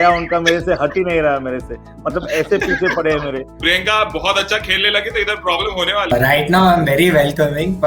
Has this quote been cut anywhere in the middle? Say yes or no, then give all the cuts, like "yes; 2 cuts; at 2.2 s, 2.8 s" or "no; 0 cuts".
yes; 2 cuts; at 3.5 s, 6.1 s